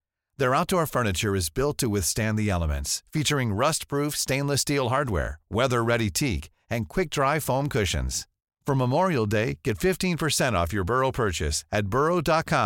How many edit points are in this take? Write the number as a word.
zero